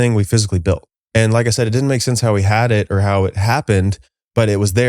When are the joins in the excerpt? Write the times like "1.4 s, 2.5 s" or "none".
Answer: 0.9 s